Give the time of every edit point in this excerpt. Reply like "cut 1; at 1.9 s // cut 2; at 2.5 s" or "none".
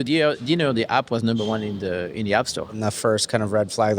cut 1; at 2.8 s

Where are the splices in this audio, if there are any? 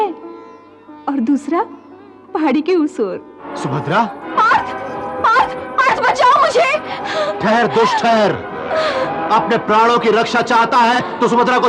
cut 1; at 3.2 s // cut 2; at 4.3 s

